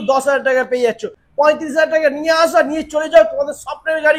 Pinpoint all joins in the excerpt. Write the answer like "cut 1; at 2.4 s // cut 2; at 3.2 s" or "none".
cut 1; at 1.1 s